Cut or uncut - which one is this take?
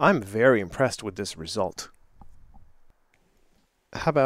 cut